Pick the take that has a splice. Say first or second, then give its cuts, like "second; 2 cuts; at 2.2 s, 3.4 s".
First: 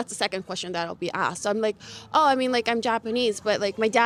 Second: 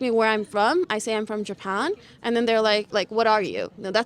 second; 1 cut; at 2.9 s